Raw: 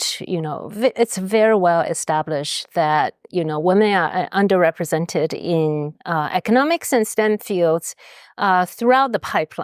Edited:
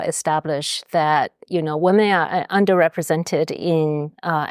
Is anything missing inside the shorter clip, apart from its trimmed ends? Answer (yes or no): no